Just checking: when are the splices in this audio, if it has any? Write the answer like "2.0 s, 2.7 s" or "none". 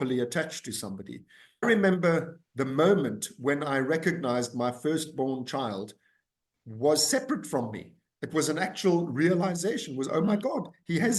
1.5 s